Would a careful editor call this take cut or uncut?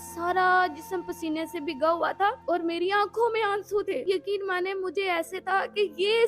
cut